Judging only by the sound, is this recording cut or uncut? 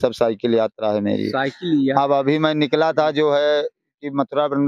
uncut